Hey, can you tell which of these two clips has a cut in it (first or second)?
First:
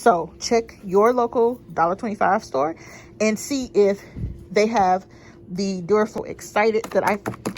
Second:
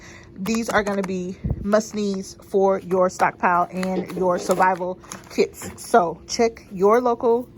first